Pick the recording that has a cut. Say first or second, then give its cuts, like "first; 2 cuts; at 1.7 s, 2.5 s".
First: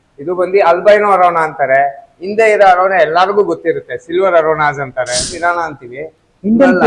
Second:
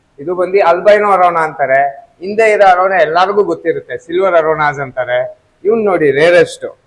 first; 1 cut; at 5.3 s